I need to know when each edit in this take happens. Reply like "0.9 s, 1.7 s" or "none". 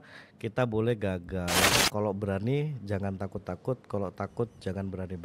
1.8 s